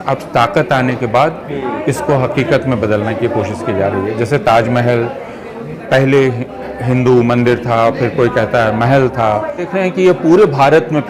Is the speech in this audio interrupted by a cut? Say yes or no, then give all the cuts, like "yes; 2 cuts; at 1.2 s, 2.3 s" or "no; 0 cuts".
yes; 1 cut; at 9.6 s